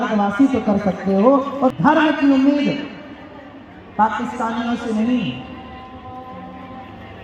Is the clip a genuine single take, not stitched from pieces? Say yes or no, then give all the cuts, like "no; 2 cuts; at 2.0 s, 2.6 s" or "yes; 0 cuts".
no; 1 cut; at 1.7 s